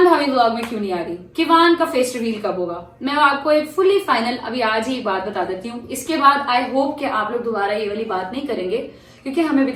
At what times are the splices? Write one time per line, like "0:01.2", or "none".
none